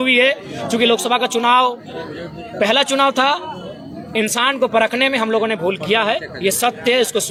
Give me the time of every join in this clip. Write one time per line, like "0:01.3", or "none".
none